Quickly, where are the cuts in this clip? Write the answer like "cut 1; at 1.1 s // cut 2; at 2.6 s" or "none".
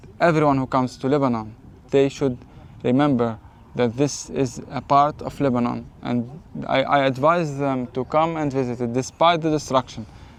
none